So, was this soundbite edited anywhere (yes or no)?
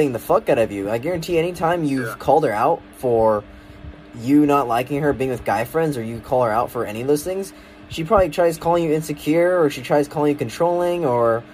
no